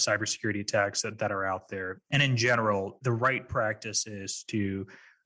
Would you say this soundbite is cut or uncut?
cut